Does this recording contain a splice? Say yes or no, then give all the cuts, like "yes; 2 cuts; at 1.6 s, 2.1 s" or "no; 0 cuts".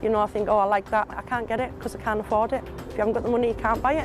yes; 2 cuts; at 1.2 s, 2.8 s